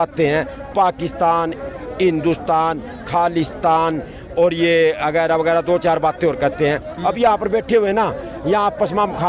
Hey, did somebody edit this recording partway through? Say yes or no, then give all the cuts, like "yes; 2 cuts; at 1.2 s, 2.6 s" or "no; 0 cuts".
no; 0 cuts